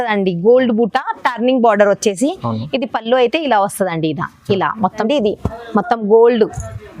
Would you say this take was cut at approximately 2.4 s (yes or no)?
no